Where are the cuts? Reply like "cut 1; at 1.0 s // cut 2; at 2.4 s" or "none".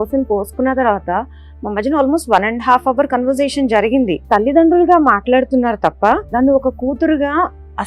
cut 1; at 4.2 s // cut 2; at 6.3 s